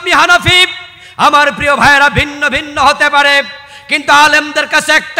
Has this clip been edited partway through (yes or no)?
no